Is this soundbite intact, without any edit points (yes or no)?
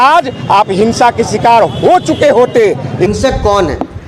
no